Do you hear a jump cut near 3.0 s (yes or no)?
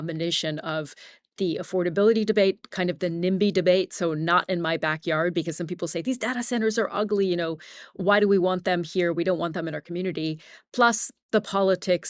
no